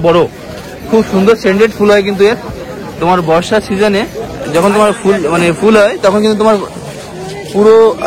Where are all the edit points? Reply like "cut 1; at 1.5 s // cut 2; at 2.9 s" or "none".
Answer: none